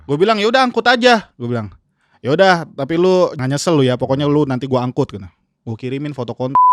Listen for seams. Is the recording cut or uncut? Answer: cut